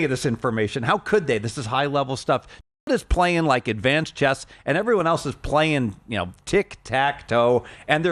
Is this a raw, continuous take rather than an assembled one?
yes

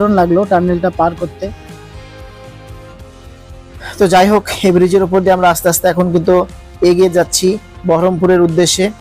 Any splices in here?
yes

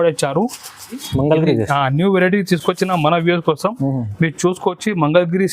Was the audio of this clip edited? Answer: yes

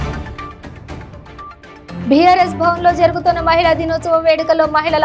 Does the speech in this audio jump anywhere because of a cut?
yes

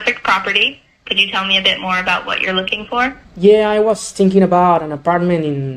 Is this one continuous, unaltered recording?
no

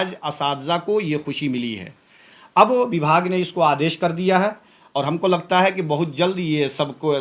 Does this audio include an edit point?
no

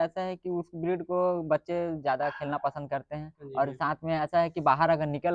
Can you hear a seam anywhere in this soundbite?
no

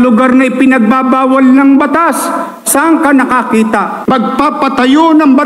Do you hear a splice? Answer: yes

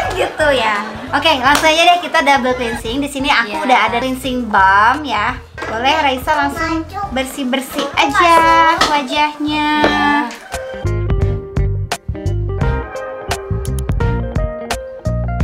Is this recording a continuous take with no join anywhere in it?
yes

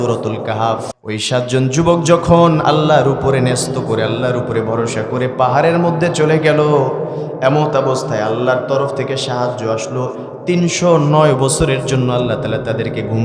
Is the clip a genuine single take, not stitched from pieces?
no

